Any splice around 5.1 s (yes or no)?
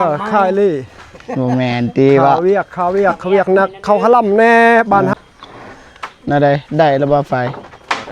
yes